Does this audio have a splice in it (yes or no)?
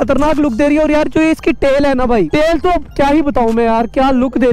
yes